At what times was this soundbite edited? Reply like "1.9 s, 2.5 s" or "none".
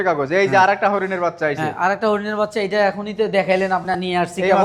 none